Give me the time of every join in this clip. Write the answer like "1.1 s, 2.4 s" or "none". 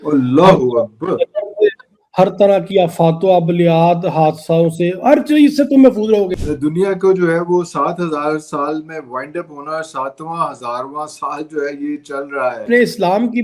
6.4 s, 12.6 s